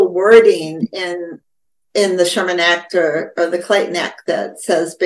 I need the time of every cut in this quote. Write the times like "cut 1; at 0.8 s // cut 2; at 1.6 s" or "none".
cut 1; at 1.4 s